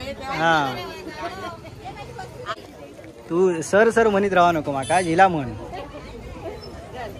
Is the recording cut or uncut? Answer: cut